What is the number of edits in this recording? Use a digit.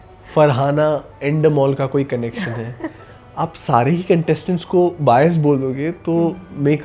0